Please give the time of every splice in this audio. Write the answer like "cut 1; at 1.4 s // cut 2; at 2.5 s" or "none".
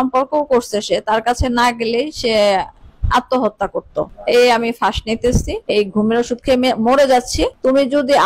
none

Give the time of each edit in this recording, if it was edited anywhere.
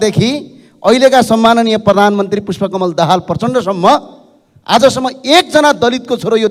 none

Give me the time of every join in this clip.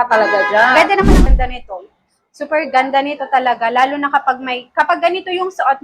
cut 1; at 1.2 s

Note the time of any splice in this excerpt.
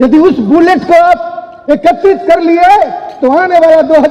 none

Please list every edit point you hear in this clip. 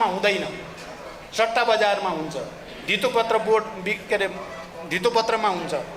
none

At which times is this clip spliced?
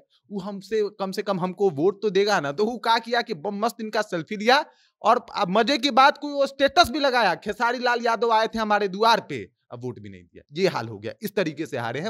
none

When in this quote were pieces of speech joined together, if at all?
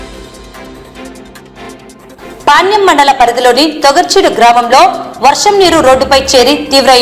cut 1; at 1.6 s

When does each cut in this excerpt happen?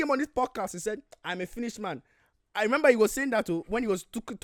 none

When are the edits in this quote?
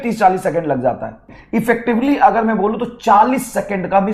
cut 1; at 1.3 s

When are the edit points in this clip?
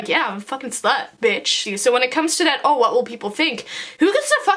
cut 1; at 1.5 s

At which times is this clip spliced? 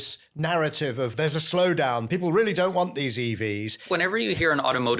cut 1; at 3.8 s

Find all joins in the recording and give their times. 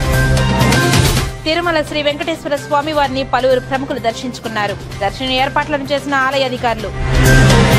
cut 1; at 1.2 s

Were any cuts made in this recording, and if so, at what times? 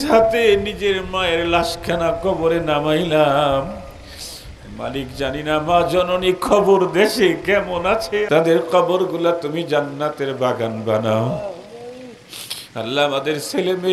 cut 1; at 8.3 s

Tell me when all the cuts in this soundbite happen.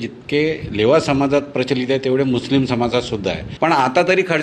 cut 1; at 3.4 s

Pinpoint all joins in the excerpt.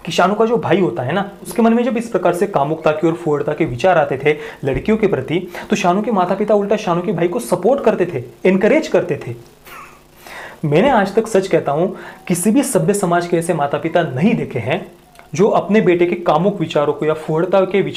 none

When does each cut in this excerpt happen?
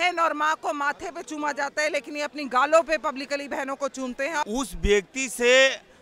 cut 1; at 4.5 s

